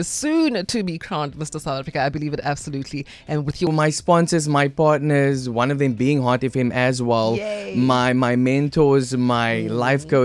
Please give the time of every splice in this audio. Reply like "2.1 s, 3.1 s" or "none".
3.7 s